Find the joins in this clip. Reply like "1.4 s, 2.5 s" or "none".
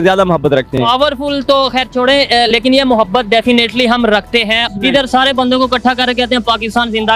none